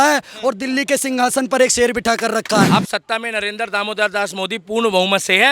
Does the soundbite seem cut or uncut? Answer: cut